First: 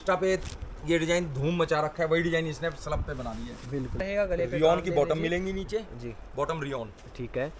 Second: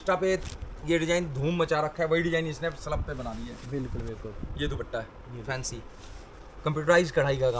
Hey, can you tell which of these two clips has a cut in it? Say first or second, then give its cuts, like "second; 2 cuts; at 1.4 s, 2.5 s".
first; 1 cut; at 4.0 s